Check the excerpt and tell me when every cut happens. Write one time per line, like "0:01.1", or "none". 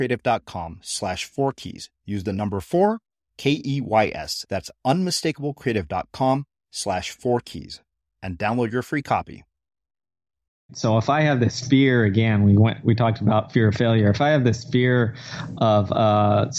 0:10.7

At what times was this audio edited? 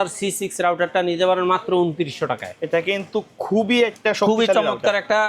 none

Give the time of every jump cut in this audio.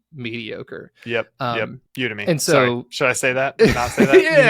0:01.8

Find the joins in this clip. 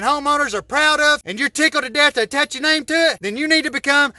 0:01.3
0:03.2

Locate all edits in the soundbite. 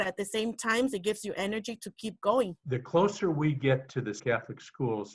0:02.6
0:04.2

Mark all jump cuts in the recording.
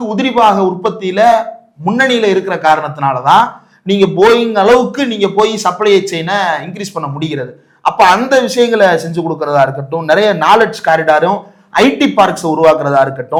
none

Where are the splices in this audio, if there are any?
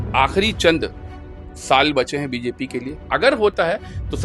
0:03.0

